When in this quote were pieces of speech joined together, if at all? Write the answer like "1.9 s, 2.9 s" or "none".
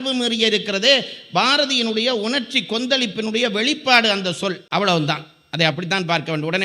none